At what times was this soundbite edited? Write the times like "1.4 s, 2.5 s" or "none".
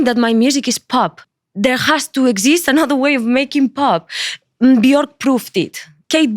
1.2 s